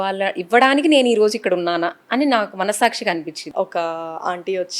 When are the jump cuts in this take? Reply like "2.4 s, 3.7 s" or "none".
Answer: 3.4 s